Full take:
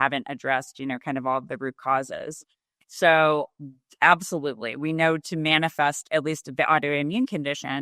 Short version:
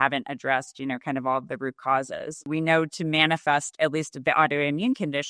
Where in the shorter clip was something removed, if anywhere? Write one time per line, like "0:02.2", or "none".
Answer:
0:02.4